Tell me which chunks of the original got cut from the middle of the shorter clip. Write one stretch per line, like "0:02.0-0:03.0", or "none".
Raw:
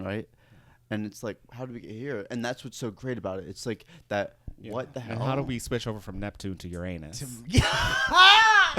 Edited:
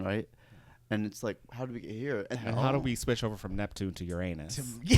0:02.3-0:05.0